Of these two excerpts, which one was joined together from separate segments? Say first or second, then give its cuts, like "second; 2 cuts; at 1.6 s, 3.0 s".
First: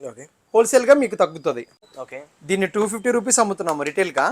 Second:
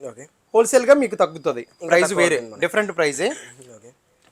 first; 1 cut; at 1.8 s